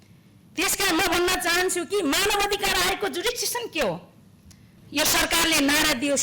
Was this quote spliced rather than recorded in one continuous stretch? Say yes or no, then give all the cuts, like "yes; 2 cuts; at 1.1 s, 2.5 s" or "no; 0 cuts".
yes; 1 cut; at 4.8 s